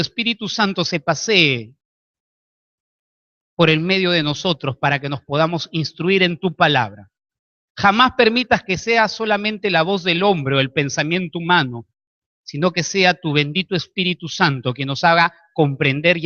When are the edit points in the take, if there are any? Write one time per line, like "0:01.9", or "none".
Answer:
none